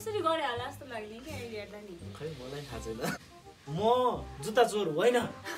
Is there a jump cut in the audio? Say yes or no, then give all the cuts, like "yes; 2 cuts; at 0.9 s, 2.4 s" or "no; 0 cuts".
yes; 1 cut; at 3.2 s